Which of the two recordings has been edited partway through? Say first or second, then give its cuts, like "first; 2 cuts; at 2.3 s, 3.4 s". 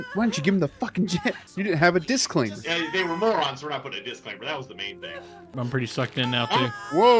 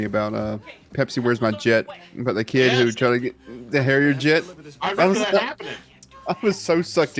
first; 3 cuts; at 1.5 s, 2.6 s, 5.5 s